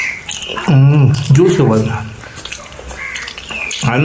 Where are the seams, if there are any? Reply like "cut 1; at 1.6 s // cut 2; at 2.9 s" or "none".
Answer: none